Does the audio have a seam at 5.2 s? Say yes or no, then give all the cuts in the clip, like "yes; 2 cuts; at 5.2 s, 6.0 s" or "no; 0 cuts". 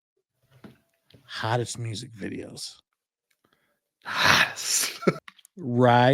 yes; 1 cut; at 5.2 s